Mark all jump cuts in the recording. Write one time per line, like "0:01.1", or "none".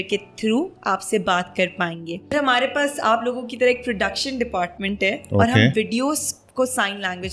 0:02.3